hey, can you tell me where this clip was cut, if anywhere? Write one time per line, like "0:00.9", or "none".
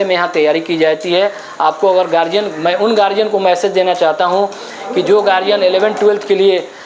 none

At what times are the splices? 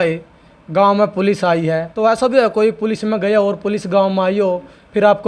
0:01.9

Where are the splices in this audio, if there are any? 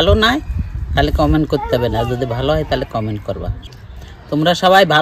0:03.6

